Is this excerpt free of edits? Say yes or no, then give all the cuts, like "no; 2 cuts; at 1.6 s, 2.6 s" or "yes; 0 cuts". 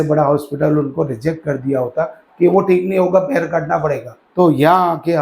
no; 1 cut; at 4.1 s